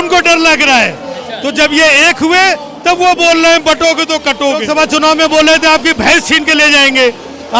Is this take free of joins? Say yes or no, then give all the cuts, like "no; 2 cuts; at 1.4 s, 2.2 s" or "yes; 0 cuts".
no; 1 cut; at 4.7 s